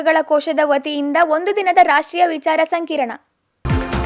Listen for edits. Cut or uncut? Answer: uncut